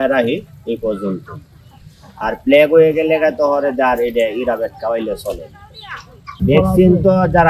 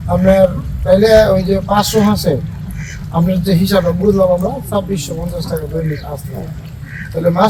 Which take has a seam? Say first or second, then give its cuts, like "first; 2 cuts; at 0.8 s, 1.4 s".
first; 1 cut; at 6.4 s